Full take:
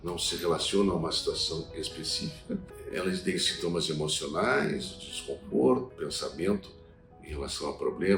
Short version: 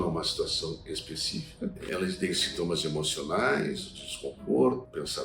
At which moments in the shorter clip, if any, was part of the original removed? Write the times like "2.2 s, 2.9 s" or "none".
1.8 s